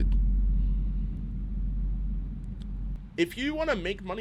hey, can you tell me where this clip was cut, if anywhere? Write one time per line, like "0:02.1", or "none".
0:02.9